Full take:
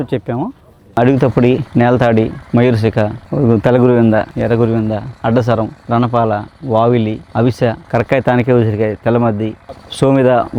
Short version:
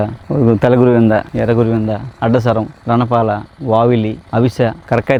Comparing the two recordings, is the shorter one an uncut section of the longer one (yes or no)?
yes